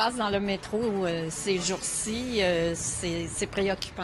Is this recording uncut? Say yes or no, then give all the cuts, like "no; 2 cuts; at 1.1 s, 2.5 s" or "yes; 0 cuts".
yes; 0 cuts